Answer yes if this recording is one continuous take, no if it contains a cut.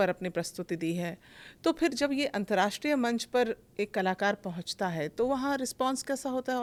yes